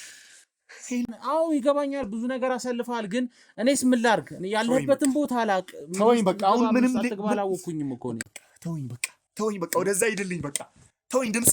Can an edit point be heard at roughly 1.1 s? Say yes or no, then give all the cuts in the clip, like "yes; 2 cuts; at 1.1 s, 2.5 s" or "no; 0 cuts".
yes; 2 cuts; at 1.1 s, 8.2 s